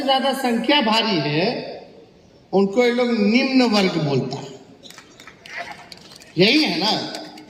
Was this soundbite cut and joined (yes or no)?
no